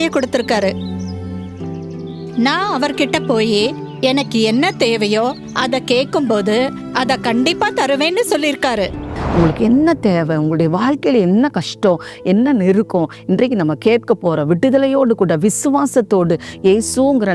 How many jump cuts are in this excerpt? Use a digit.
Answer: 1